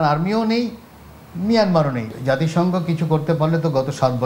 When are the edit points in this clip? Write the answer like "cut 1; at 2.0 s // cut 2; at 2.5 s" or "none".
cut 1; at 2.1 s